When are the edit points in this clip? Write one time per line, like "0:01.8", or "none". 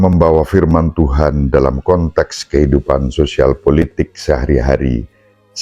none